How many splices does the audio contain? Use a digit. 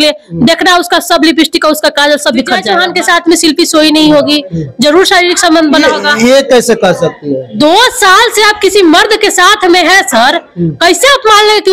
1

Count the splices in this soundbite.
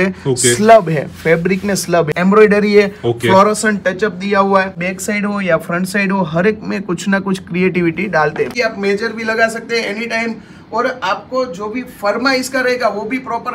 3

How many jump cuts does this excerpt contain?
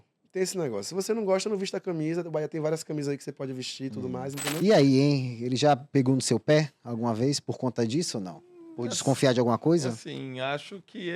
1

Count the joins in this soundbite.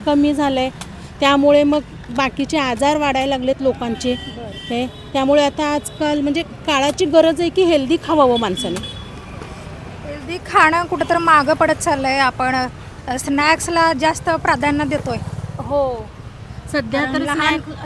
0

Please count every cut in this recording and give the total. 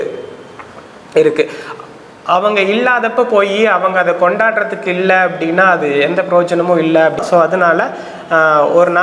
1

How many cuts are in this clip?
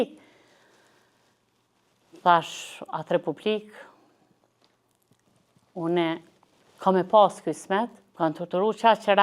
1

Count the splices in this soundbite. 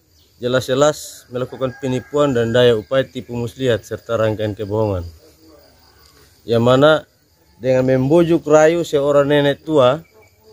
0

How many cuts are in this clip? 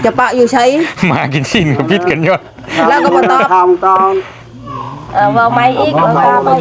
0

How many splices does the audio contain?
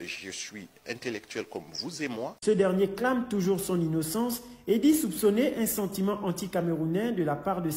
1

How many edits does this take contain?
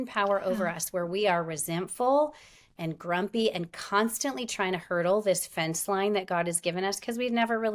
0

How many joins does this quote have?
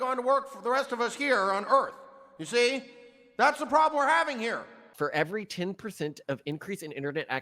1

